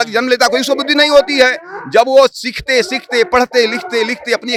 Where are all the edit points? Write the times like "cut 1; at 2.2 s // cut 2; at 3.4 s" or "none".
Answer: none